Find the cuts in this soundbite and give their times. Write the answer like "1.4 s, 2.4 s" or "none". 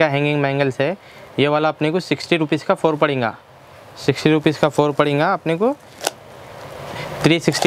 none